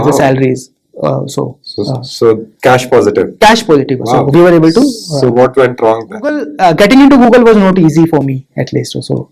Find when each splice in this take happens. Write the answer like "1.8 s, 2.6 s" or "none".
6.5 s